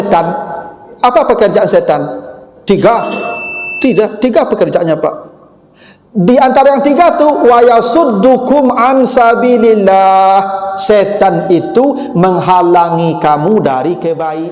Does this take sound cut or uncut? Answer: uncut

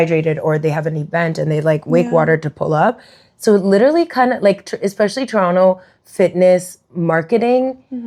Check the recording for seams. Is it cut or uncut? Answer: uncut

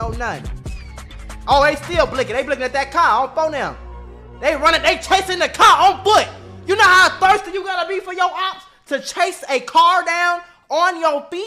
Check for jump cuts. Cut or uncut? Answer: uncut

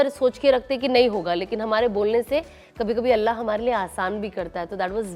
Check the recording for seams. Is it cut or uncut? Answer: uncut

